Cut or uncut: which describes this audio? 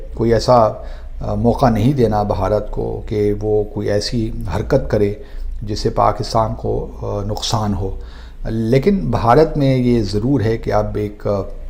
uncut